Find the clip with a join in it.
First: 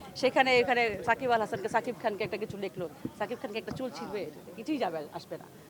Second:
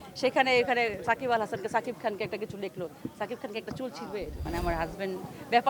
second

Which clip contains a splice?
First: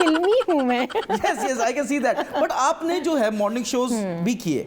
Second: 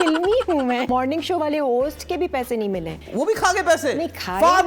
second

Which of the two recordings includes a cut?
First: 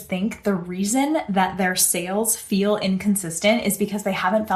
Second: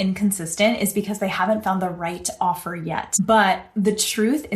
second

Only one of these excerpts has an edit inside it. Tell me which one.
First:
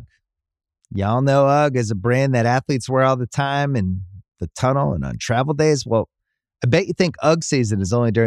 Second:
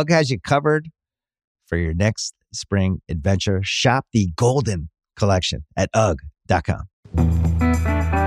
second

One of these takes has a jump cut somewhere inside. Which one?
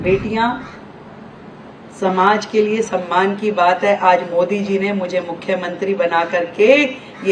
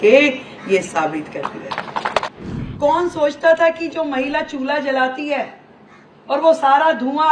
second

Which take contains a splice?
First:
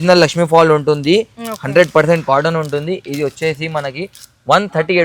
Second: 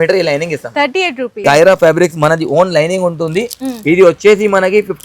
second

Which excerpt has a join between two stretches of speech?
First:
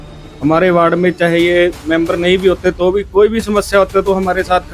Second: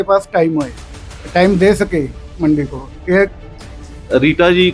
second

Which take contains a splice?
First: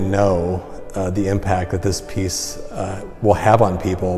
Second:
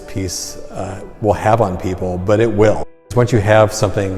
second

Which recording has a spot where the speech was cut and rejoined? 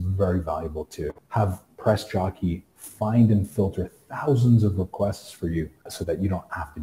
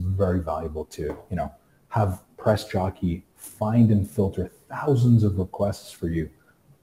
first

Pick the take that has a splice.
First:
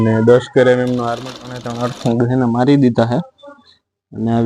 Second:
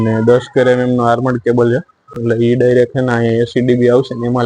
first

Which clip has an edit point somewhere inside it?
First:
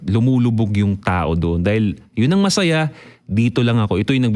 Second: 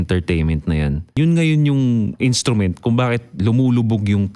second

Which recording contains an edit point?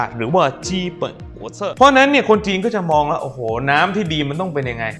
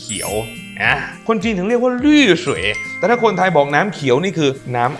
first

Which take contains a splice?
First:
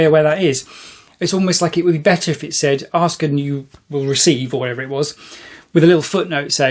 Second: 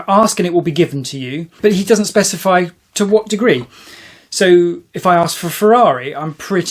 second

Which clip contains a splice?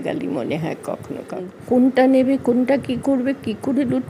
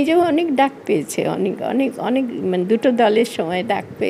first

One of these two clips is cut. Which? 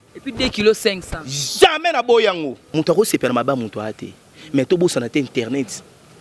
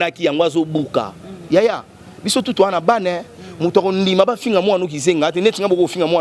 first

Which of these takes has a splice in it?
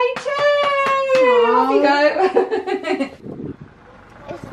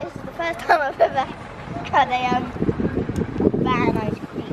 first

